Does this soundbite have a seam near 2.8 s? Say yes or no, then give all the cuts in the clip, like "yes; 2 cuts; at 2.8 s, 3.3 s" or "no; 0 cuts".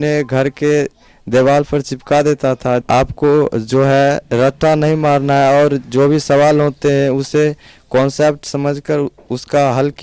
yes; 1 cut; at 2.8 s